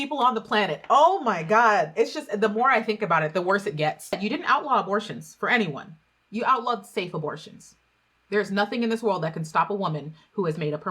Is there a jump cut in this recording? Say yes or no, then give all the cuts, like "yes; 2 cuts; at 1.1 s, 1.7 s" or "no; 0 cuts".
yes; 1 cut; at 4.2 s